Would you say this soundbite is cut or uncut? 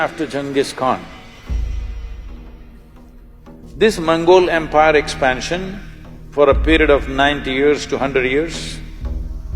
cut